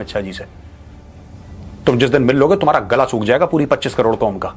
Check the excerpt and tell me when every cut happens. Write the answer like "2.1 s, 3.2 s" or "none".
none